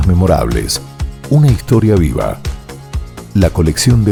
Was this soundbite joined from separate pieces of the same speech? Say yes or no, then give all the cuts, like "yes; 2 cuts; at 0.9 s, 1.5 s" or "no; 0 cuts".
no; 0 cuts